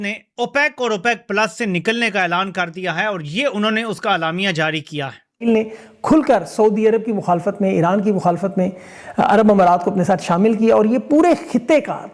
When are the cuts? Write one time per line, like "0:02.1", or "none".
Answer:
0:05.4